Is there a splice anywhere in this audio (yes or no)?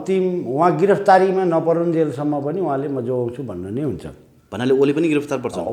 no